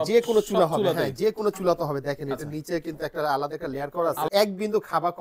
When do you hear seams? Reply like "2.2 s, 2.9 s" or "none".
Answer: 4.3 s